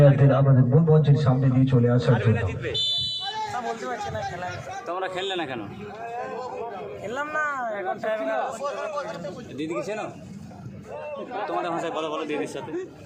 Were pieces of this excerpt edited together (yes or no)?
no